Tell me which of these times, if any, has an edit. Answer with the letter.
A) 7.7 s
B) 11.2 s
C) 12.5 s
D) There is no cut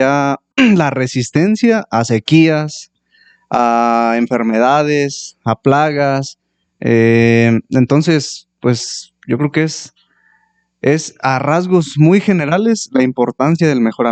D